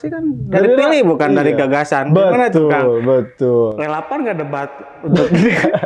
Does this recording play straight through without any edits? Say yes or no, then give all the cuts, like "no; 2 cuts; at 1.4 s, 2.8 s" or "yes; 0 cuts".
yes; 0 cuts